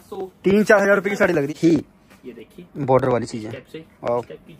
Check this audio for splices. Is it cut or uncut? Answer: cut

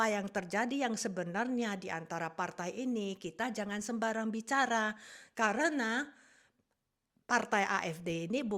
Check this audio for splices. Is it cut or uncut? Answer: uncut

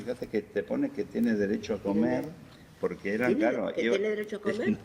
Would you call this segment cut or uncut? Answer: cut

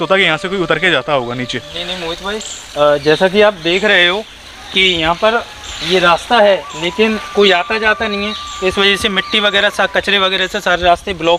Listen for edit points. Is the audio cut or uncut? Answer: uncut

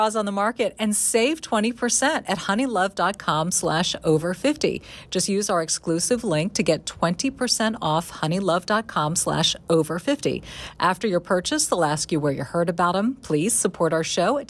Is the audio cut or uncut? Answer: uncut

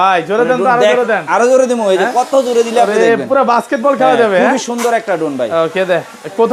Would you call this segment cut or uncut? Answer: uncut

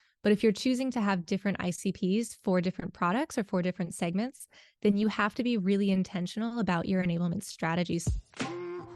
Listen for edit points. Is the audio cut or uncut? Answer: cut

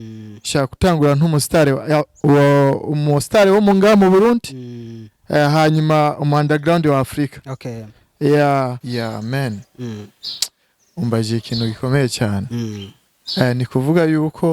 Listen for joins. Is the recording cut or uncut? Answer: cut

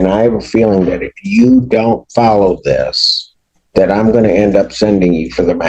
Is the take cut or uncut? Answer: uncut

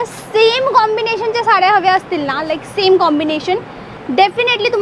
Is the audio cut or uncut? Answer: uncut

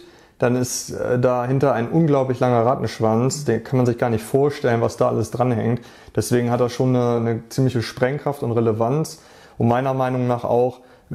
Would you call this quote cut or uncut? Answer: uncut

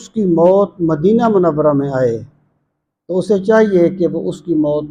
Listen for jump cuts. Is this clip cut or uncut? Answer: uncut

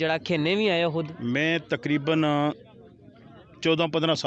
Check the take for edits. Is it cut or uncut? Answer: cut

